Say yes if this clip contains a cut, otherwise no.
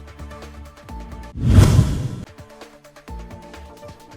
no